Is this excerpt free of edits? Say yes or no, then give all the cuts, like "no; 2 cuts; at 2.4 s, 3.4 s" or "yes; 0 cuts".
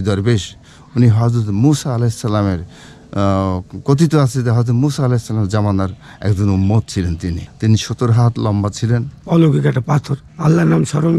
no; 1 cut; at 9.1 s